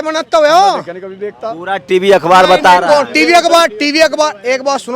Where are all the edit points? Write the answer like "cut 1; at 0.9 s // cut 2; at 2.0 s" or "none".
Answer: none